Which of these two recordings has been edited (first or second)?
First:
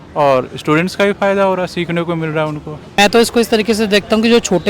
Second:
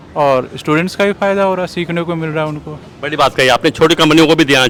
first